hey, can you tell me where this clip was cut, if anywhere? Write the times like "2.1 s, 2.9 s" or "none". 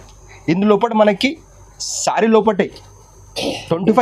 none